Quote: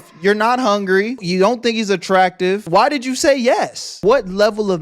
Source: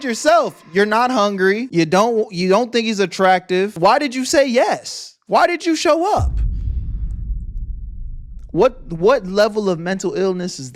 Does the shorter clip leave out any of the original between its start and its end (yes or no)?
yes